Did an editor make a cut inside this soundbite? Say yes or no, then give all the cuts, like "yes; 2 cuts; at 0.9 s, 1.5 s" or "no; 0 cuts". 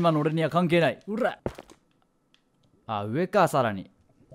yes; 1 cut; at 1.4 s